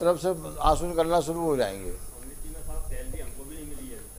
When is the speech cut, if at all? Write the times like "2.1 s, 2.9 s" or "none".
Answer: none